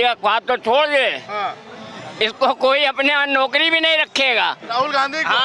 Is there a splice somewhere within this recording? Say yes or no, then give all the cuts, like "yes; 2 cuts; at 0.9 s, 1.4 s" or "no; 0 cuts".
no; 0 cuts